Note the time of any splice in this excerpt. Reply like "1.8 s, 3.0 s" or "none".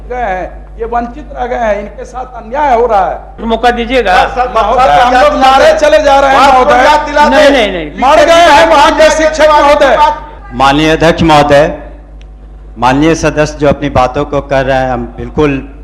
3.4 s, 10.3 s